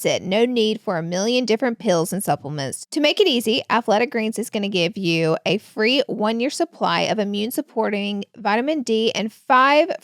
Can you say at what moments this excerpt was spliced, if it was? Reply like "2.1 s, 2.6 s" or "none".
2.8 s